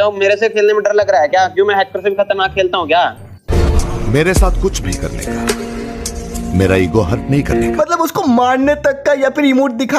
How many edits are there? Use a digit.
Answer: 2